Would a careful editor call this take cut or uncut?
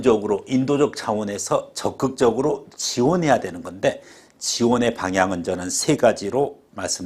uncut